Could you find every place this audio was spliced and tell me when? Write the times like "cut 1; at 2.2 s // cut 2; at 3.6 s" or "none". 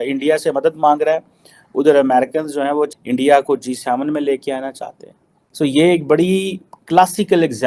cut 1; at 5.3 s